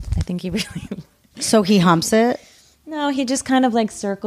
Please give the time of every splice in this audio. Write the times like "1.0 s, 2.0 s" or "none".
none